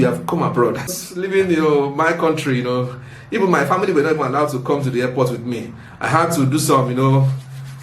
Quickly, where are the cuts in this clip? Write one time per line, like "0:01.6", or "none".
0:00.9